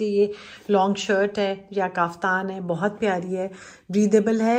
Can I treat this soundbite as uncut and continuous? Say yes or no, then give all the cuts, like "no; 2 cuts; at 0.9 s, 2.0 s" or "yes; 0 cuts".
yes; 0 cuts